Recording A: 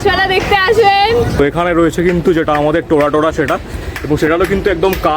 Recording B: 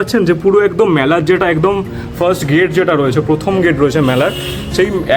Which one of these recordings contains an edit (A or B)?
A